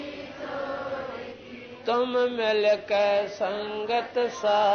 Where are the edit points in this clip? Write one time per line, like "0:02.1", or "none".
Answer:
none